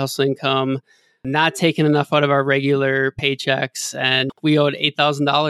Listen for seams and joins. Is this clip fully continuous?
no; 1 cut; at 4.3 s

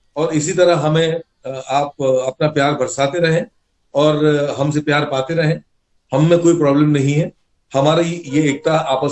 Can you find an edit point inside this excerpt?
no; 0 cuts

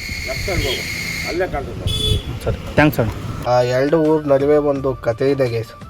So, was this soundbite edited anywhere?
yes; 1 cut; at 3.3 s

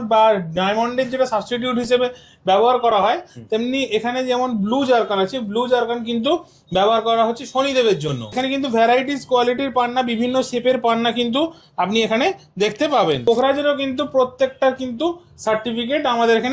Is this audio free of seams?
no; 2 cuts; at 8.4 s, 13.2 s

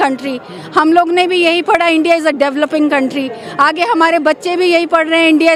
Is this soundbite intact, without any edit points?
yes; 0 cuts

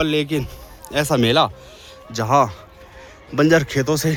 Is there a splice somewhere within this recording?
no; 0 cuts

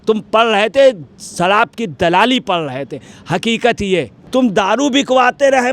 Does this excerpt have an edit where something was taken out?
yes; 1 cut; at 4.2 s

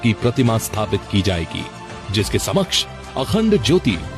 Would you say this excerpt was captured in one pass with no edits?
no; 1 cut; at 1.6 s

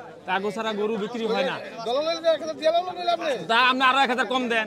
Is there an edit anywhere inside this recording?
no; 0 cuts

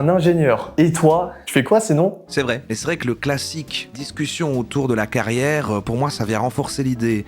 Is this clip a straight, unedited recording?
no; 1 cut; at 2.7 s

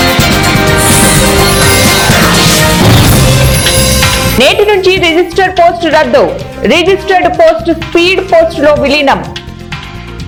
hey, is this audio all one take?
yes; 0 cuts

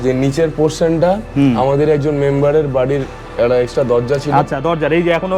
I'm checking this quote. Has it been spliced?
no; 0 cuts

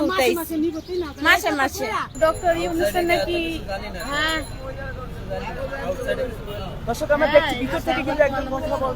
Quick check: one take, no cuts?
no; 1 cut; at 2.1 s

